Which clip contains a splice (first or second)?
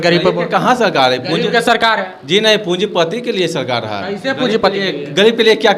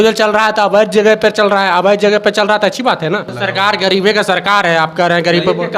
second